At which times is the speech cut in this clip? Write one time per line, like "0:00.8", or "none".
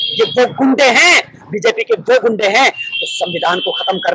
none

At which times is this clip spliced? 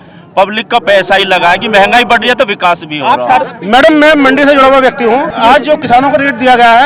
0:03.5
0:05.3

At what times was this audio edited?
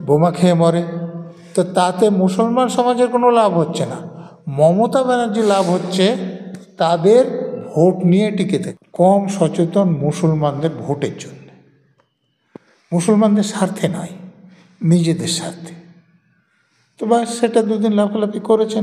0:08.8

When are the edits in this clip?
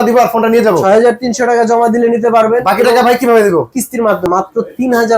0:04.3

